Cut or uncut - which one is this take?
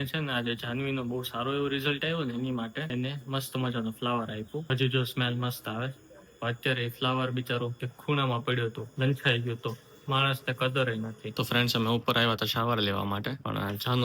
cut